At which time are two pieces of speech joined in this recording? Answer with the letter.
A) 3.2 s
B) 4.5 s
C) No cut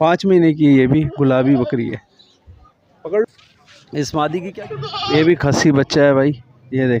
B